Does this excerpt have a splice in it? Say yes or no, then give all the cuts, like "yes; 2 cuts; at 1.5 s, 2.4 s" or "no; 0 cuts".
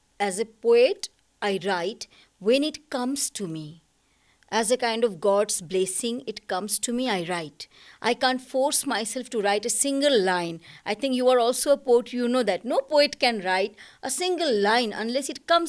no; 0 cuts